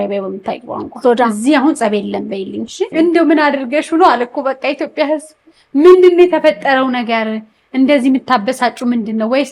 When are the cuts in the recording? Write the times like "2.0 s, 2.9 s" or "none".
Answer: 2.8 s